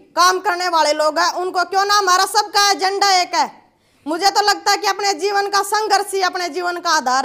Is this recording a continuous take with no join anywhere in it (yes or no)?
yes